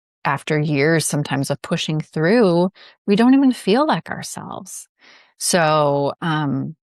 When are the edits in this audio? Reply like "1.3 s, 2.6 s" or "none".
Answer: none

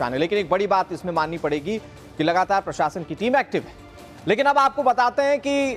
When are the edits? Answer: none

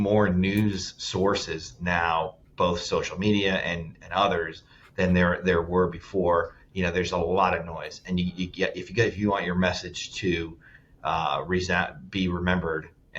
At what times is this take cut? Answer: none

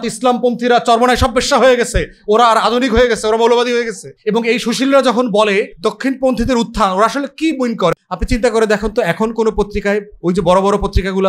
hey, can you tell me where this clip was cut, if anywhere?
4.0 s, 5.7 s, 7.9 s

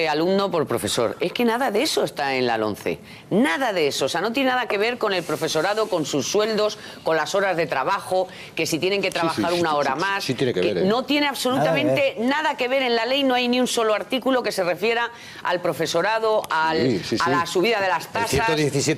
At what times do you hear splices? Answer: 12.4 s

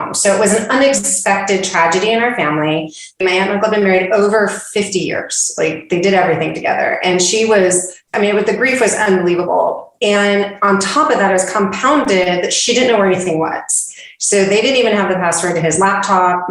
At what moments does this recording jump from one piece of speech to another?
3.2 s, 8.1 s

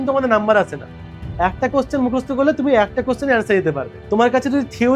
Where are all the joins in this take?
3.9 s

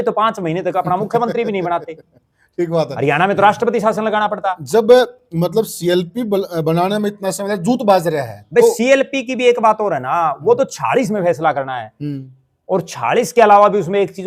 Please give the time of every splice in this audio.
none

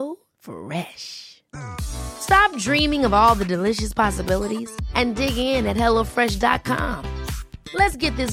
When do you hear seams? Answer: none

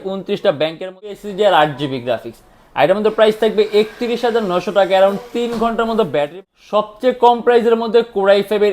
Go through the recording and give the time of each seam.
1.2 s, 6.3 s

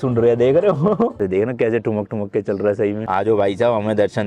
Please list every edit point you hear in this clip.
1.2 s, 3.0 s

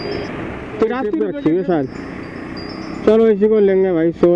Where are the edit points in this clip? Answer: 1.2 s

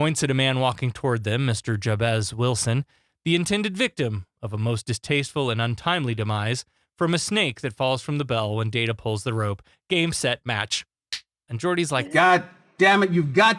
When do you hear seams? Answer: 11.8 s

